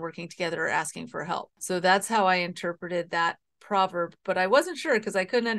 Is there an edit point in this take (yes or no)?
yes